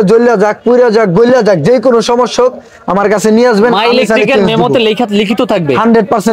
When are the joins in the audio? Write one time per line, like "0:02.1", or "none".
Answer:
none

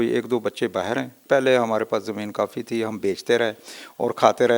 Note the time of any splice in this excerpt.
0:01.2

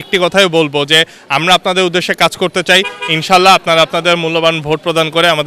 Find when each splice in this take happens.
none

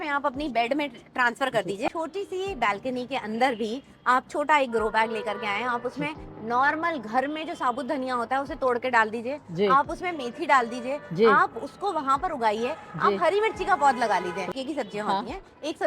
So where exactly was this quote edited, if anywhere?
0:01.9
0:14.5

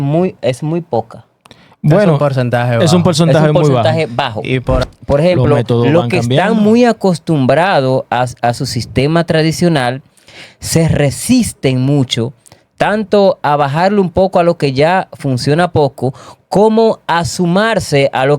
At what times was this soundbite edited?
0:04.8

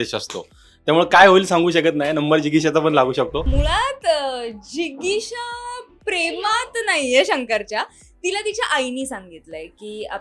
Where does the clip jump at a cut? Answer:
0:03.5

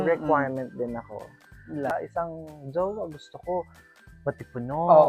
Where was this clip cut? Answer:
0:01.9

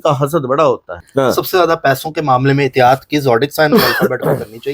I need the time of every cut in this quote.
0:01.0

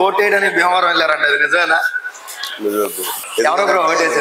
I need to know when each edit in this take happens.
0:03.2

